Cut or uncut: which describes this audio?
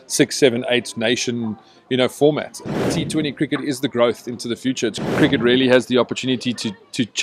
cut